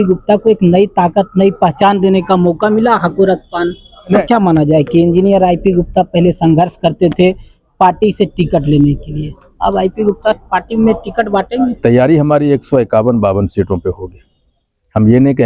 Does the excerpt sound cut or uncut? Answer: cut